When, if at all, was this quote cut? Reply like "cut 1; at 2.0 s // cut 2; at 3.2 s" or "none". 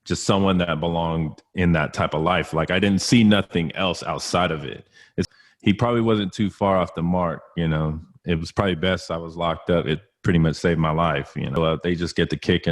cut 1; at 5.3 s // cut 2; at 11.6 s